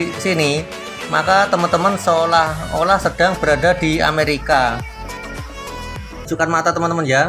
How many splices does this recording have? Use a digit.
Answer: 1